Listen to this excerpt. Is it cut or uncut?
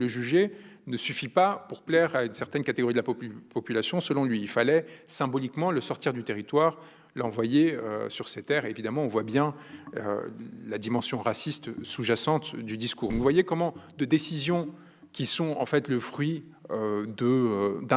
cut